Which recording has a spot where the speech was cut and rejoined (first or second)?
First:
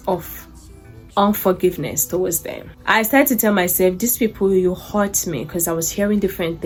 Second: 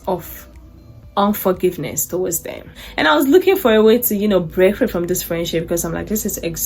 second